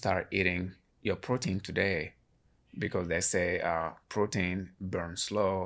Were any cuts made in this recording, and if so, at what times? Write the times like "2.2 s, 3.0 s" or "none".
2.3 s